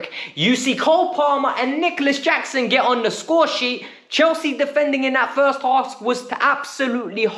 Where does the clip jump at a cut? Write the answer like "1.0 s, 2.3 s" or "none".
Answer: none